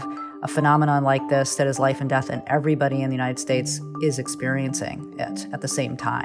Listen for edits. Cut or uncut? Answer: cut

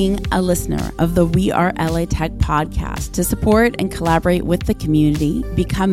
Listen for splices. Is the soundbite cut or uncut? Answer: uncut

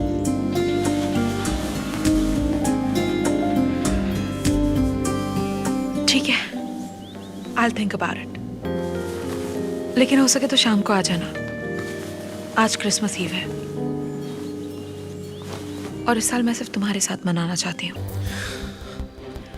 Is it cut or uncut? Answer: cut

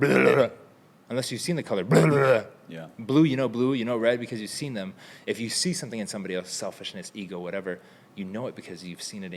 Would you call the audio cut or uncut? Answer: uncut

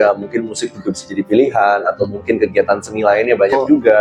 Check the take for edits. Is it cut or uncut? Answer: uncut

